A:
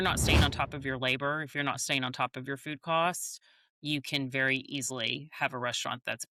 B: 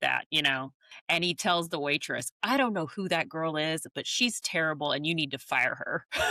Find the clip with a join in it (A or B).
B